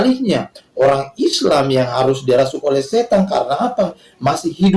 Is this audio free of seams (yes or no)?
yes